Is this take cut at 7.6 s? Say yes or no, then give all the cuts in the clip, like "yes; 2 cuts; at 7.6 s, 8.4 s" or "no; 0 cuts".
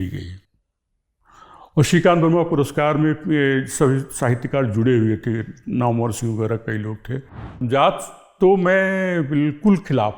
yes; 1 cut; at 7.6 s